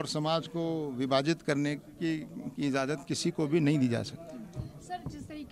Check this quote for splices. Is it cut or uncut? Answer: uncut